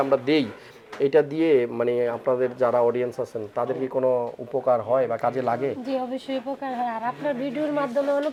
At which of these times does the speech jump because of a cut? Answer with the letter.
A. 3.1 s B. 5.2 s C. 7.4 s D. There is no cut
D